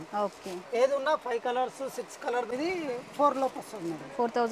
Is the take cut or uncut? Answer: cut